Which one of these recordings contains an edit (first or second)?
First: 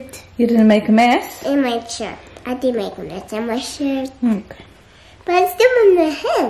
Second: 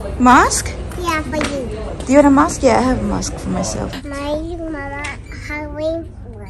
second